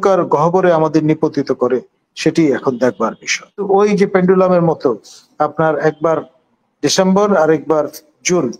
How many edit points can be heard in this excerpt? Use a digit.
1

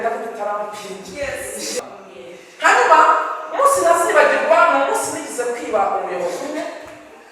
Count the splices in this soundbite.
1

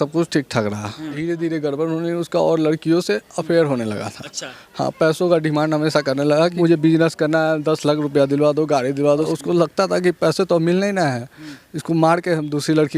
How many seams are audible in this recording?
3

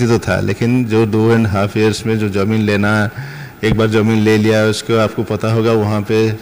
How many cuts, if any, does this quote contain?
0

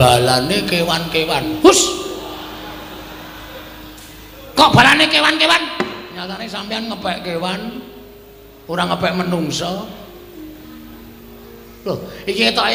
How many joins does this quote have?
0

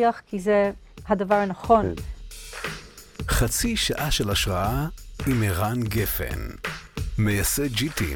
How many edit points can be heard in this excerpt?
1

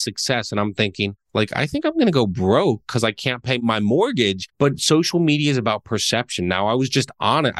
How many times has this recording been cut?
3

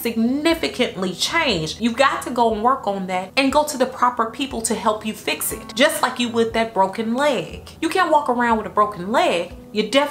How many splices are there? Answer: 0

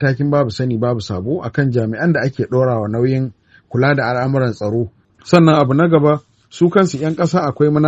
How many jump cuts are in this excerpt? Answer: 1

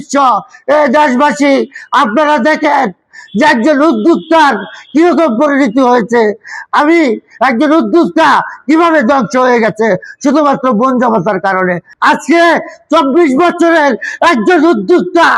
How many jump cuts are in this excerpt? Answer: 1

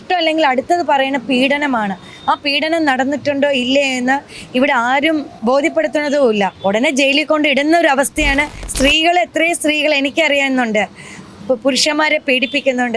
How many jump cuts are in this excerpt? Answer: 3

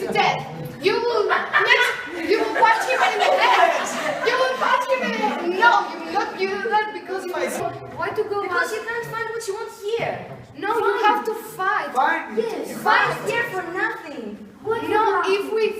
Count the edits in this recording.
1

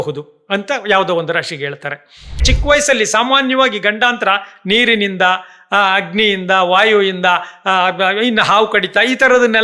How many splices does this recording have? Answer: 1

